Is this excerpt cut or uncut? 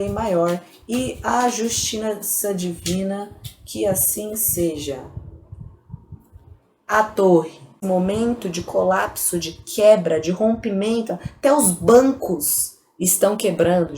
cut